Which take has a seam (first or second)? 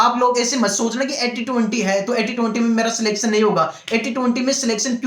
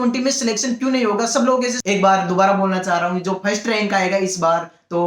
second